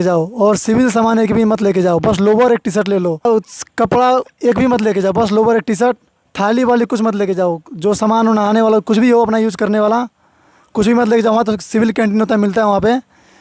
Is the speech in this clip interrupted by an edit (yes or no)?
no